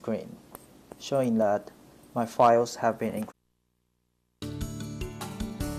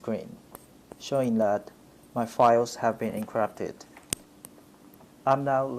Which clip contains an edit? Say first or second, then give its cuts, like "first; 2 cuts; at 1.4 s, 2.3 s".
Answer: second; 1 cut; at 3.3 s